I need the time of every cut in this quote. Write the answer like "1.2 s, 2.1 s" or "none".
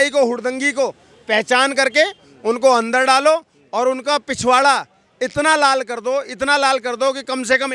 none